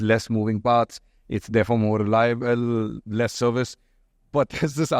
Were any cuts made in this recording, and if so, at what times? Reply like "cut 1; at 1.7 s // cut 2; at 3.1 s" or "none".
none